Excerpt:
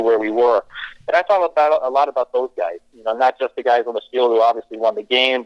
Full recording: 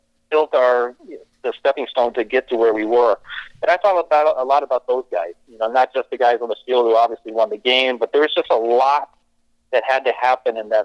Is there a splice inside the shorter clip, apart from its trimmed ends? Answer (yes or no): no